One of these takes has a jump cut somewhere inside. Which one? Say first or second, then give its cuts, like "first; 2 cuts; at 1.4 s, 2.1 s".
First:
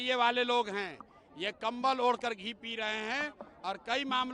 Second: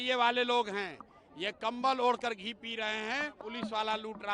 second; 1 cut; at 3.4 s